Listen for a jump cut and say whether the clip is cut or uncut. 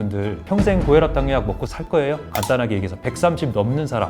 cut